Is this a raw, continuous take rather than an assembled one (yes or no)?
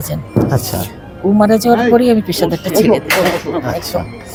yes